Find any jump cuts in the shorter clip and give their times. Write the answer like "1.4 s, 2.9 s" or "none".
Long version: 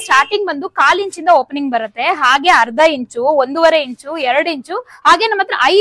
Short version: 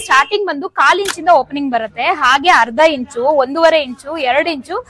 none